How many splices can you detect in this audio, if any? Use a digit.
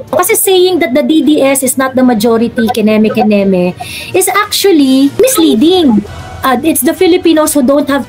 1